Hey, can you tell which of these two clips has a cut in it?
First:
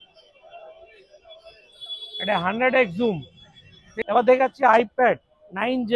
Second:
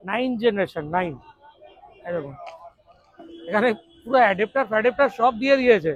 first; 1 cut; at 3.8 s

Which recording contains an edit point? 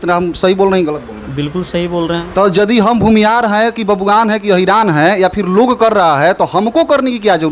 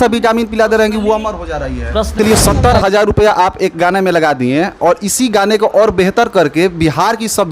second; 1 cut; at 2.2 s

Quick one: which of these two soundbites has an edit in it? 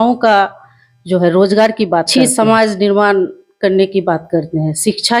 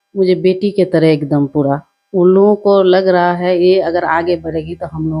first; 1 cut; at 2.1 s

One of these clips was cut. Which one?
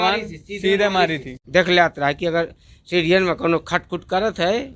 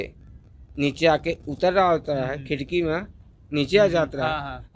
first; 1 cut; at 1.3 s

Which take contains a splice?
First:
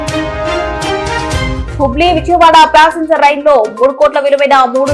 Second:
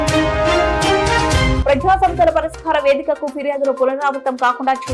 first; 1 cut; at 1.5 s

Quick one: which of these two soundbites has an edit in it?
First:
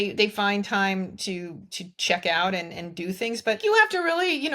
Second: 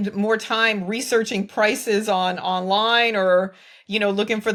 first; 1 cut; at 3.6 s

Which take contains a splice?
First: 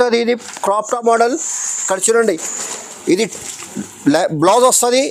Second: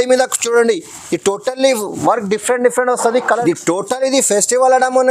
second; 1 cut; at 3.4 s

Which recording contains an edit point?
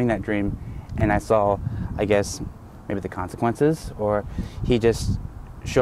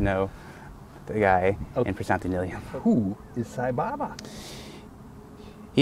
second; 1 cut; at 2.6 s

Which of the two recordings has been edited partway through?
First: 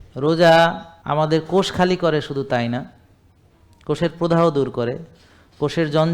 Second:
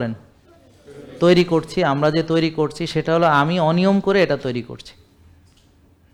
first; 1 cut; at 0.9 s

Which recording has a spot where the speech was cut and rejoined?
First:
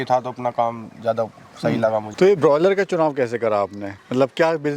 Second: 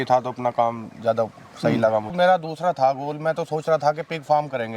second; 1 cut; at 2.1 s

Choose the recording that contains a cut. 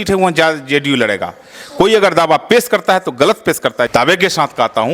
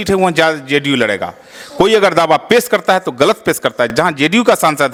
first; 1 cut; at 3.9 s

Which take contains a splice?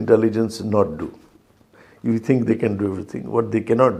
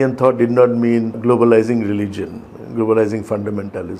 second; 1 cut; at 1.2 s

